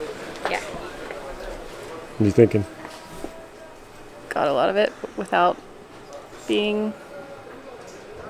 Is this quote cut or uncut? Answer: cut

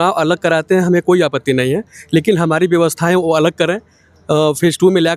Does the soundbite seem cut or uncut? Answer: uncut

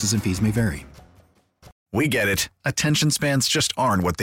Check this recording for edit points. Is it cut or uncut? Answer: cut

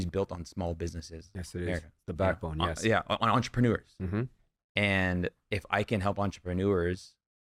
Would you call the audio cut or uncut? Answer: uncut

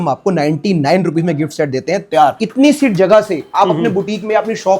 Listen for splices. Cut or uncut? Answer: cut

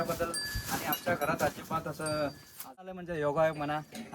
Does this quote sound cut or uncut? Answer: cut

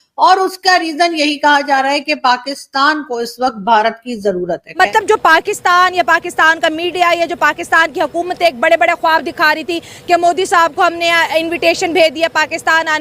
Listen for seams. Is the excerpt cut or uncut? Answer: cut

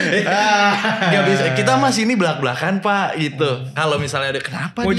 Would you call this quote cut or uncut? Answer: uncut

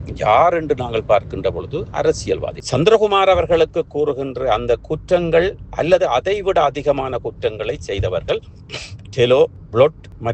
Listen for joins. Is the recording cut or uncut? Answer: cut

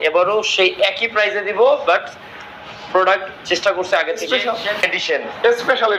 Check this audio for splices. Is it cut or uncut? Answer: cut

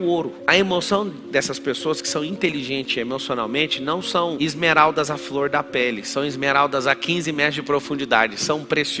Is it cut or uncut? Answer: uncut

